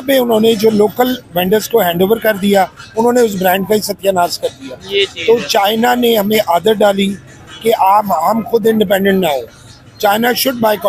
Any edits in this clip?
no; 0 cuts

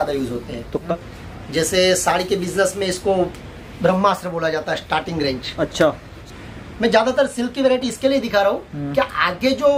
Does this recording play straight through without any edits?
no; 2 cuts; at 0.8 s, 6.2 s

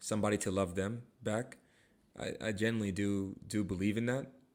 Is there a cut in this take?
no; 0 cuts

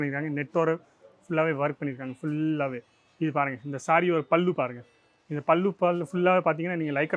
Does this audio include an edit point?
no; 0 cuts

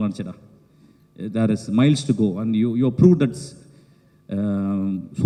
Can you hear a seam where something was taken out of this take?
no; 0 cuts

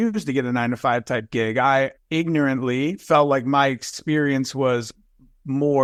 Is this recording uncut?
yes; 0 cuts

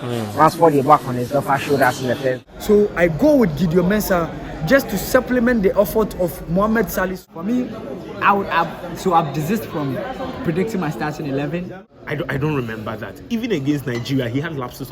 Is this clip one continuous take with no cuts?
no; 3 cuts; at 2.4 s, 7.3 s, 11.7 s

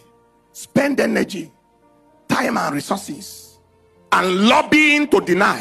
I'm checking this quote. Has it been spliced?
no; 0 cuts

